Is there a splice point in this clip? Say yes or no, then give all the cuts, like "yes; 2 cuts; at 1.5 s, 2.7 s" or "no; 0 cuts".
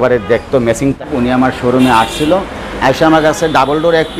yes; 1 cut; at 1.0 s